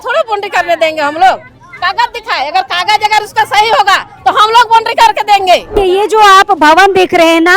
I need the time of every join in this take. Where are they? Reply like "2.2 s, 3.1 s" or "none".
5.7 s